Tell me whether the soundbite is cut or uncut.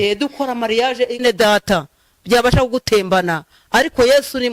cut